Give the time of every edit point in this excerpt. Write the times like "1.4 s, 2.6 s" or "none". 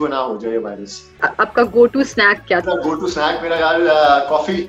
1.2 s, 2.6 s